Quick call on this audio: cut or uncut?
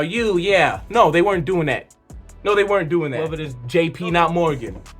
cut